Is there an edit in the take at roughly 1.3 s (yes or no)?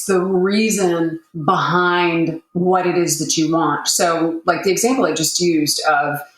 yes